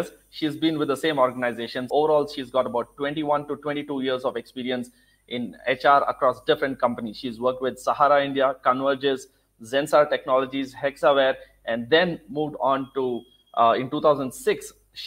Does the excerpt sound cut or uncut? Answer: cut